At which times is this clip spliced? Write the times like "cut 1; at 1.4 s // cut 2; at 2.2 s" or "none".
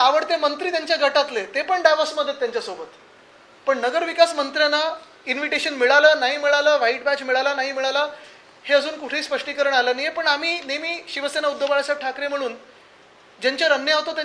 none